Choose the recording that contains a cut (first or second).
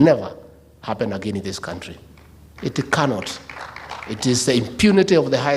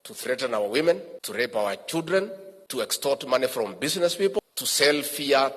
second